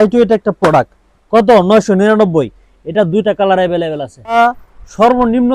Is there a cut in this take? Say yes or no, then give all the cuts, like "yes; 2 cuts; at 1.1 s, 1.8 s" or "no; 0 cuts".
yes; 1 cut; at 4.4 s